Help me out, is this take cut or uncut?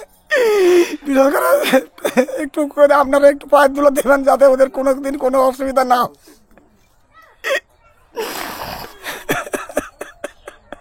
uncut